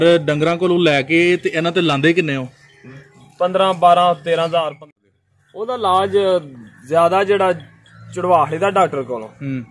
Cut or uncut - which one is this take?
cut